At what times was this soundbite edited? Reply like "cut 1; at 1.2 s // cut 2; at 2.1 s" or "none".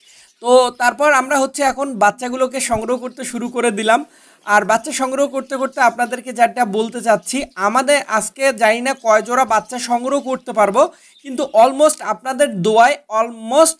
none